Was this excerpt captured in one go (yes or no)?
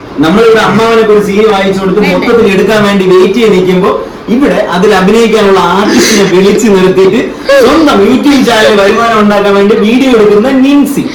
yes